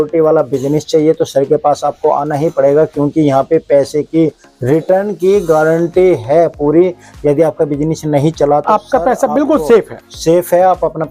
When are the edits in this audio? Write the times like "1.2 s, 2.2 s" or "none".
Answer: none